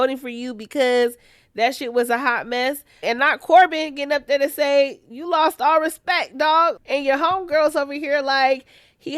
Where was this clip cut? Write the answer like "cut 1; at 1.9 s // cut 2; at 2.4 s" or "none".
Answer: cut 1; at 3.0 s // cut 2; at 6.8 s